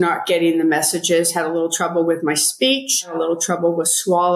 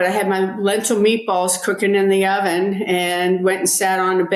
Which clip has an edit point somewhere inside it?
first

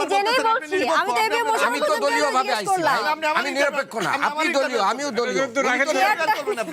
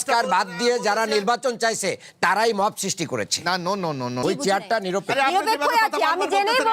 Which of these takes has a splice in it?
second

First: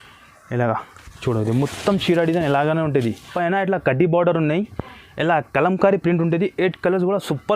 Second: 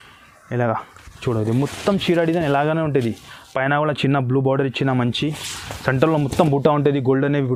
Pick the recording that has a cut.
first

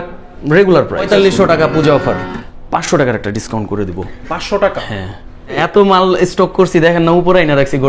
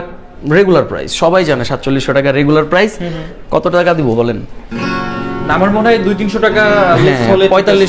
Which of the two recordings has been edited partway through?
first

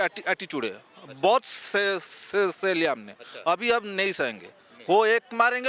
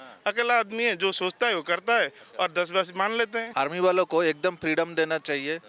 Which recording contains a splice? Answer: second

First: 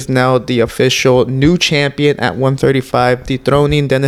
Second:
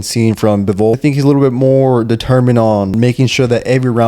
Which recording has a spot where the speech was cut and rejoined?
second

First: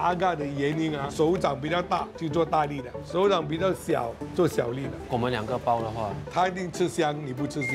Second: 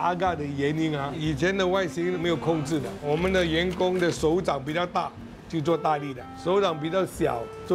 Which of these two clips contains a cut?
first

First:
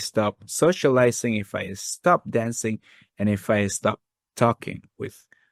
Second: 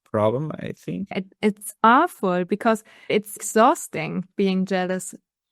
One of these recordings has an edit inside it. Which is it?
second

